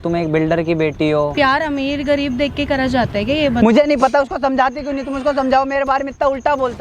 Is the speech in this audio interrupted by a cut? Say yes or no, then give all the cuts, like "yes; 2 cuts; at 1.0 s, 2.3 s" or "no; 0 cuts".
yes; 2 cuts; at 1.3 s, 3.6 s